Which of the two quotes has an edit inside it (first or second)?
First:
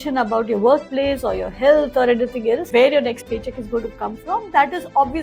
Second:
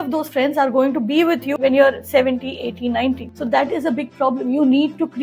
first